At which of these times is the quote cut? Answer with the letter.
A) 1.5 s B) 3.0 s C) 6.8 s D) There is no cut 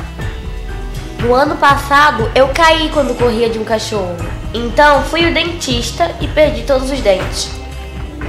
A